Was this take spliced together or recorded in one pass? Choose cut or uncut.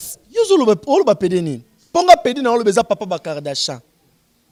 uncut